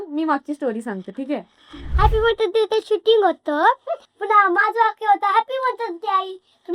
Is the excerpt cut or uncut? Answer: cut